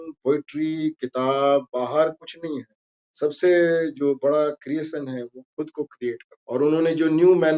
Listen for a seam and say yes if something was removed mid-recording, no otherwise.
no